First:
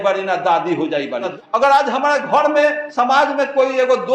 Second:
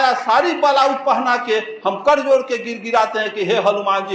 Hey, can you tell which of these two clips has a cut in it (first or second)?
first